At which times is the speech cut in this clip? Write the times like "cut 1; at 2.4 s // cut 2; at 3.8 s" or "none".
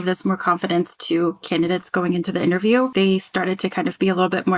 cut 1; at 2.9 s